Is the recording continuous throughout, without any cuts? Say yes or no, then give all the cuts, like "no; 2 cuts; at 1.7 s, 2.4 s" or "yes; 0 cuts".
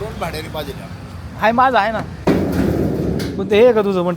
no; 1 cut; at 2.1 s